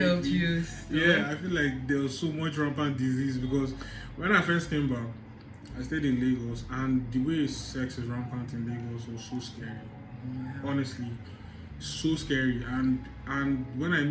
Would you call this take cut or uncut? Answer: uncut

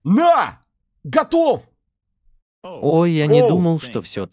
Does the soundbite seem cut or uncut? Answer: uncut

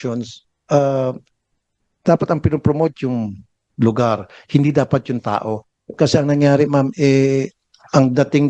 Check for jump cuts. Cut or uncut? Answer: cut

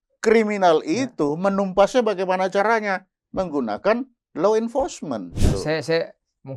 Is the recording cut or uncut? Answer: cut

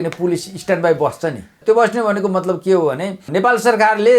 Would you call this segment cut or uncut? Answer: cut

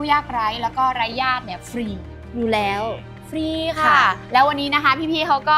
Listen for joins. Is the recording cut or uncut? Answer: cut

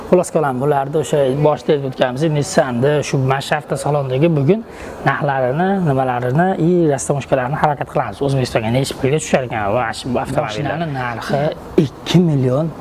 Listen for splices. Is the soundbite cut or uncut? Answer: cut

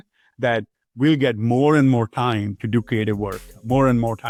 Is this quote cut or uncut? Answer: uncut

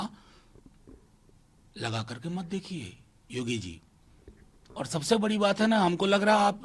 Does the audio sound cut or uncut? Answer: uncut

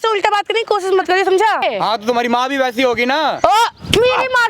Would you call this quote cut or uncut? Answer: cut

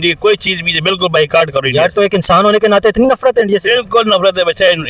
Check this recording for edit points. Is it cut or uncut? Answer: uncut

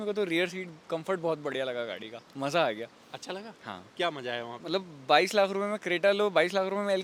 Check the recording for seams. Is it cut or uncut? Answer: uncut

